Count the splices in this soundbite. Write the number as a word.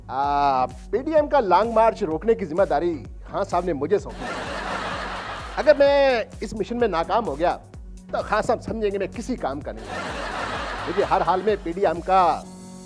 zero